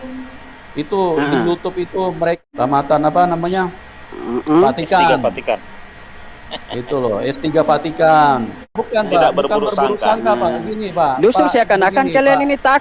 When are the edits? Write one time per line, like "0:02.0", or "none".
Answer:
0:02.4
0:08.8